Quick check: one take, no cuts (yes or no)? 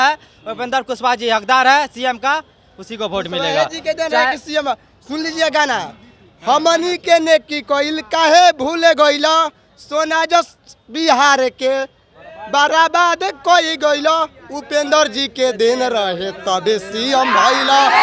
yes